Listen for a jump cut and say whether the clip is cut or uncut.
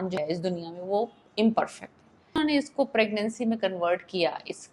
cut